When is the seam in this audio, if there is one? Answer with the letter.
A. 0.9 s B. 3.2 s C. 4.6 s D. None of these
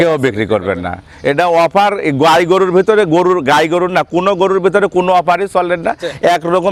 D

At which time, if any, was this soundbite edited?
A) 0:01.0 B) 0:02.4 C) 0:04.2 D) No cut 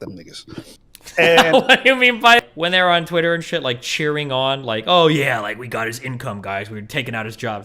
B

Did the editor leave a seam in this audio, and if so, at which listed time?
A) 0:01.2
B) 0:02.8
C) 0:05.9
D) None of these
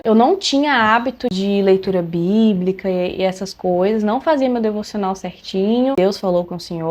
C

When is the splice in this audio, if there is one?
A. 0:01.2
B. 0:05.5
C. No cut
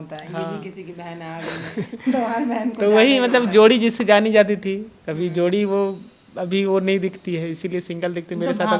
C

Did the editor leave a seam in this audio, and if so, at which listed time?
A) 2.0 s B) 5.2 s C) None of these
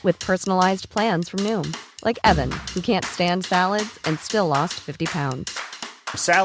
C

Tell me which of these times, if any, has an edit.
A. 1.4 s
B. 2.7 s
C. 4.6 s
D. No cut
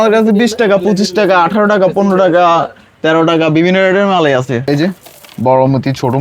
C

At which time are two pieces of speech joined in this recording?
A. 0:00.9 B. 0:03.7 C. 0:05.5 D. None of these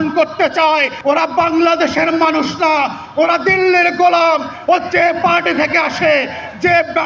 A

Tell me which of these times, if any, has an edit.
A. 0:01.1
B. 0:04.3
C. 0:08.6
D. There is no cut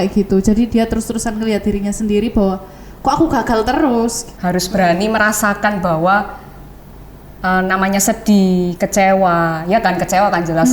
B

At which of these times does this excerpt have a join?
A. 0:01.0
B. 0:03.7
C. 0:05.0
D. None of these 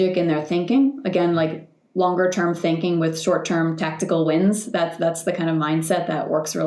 D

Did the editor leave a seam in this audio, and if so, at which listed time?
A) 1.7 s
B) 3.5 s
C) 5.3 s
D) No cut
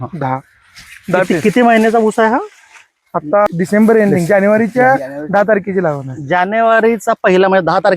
B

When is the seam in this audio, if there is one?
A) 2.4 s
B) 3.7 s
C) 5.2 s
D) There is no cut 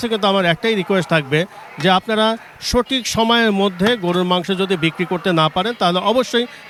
D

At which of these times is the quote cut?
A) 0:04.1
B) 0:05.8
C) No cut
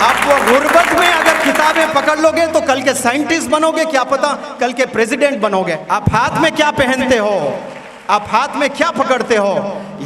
B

